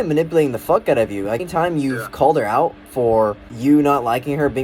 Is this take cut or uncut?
cut